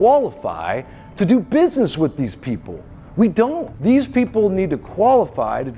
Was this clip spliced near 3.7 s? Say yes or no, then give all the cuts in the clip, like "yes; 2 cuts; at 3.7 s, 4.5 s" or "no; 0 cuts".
yes; 1 cut; at 3.7 s